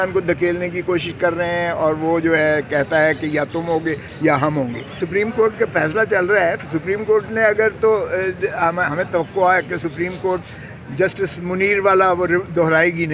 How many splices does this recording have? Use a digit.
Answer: 1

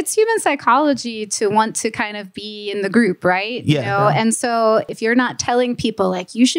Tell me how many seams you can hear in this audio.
1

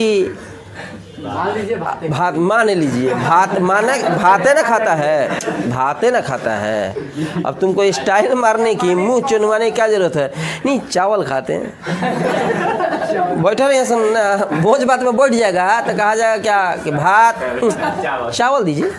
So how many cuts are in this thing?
0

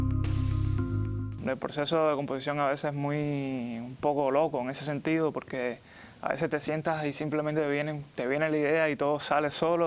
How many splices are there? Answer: 1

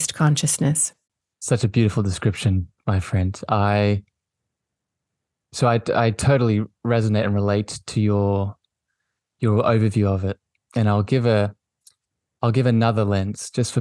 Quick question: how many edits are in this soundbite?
0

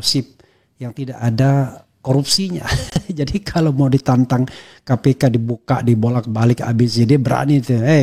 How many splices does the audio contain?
0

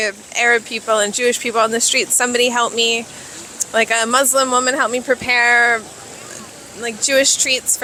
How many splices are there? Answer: 0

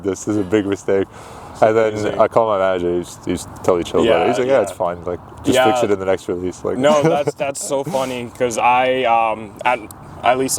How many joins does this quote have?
0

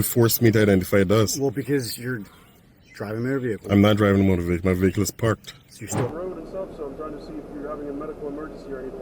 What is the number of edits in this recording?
1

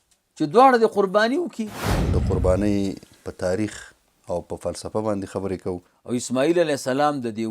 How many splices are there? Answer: 2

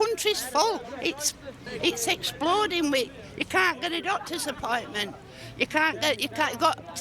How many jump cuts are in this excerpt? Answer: 1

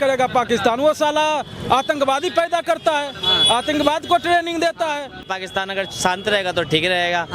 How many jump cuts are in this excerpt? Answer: 1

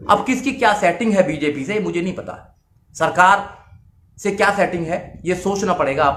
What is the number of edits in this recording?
0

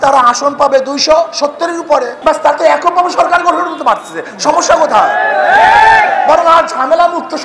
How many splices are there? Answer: 1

